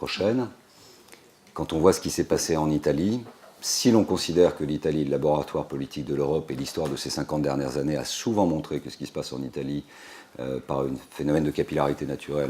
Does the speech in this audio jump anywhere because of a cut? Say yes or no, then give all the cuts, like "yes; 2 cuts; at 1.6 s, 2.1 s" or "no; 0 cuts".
yes; 1 cut; at 8.1 s